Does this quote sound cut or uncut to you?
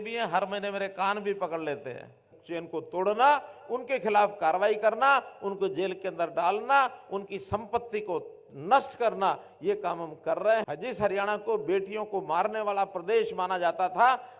cut